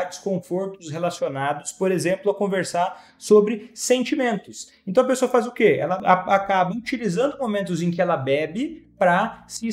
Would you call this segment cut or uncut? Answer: cut